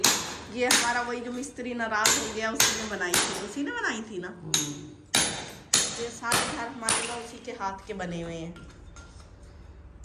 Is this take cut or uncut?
uncut